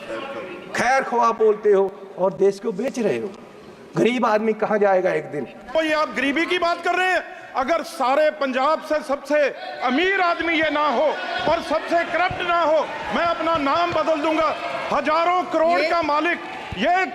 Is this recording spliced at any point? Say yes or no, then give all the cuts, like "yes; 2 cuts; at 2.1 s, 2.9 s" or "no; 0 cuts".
yes; 1 cut; at 5.8 s